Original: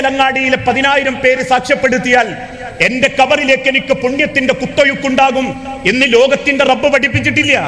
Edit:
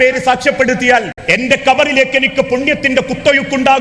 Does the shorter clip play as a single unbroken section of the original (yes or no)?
no